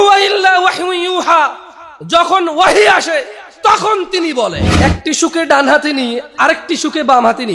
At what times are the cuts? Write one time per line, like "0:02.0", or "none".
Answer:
0:04.6